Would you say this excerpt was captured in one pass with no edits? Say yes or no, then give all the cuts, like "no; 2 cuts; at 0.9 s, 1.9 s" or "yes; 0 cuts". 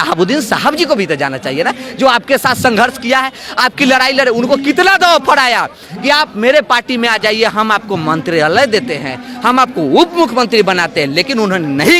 yes; 0 cuts